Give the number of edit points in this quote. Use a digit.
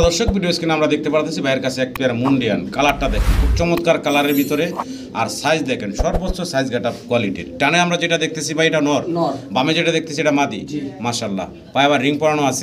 0